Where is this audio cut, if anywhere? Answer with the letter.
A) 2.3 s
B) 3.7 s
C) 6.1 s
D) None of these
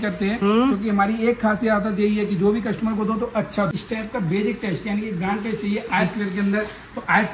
B